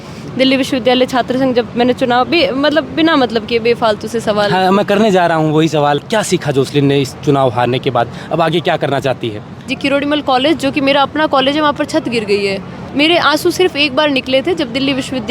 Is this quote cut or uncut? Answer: cut